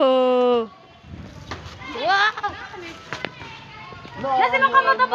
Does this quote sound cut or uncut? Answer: uncut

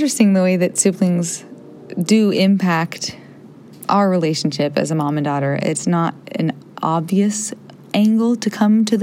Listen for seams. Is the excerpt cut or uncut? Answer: uncut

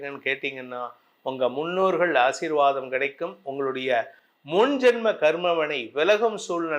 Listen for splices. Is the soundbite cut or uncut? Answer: uncut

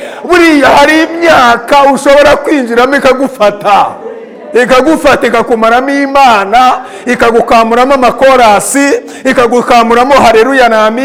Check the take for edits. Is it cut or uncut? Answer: uncut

